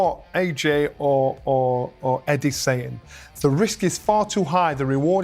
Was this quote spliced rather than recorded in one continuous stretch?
no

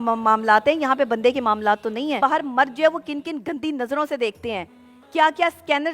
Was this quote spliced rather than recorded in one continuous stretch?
yes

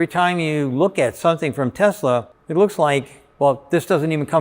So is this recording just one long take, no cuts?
no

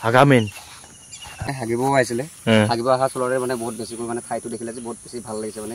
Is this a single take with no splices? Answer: no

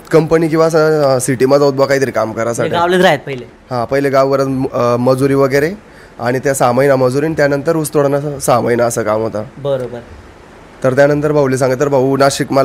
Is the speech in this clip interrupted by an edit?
no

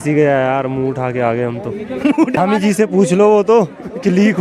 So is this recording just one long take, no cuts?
no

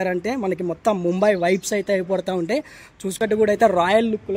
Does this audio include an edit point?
yes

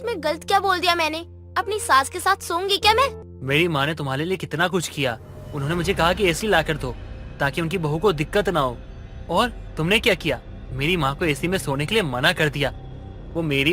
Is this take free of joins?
no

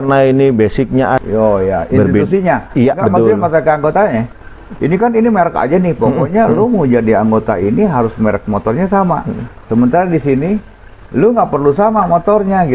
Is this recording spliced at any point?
yes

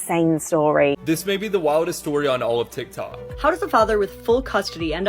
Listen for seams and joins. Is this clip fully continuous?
no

